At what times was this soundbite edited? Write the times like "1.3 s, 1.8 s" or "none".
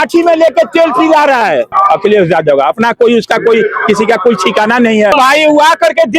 1.7 s, 5.1 s